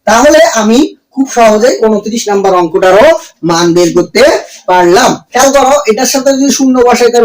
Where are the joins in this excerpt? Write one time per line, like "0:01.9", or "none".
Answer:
0:05.2